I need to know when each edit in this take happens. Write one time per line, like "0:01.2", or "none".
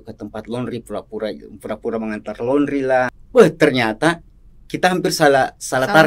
0:03.2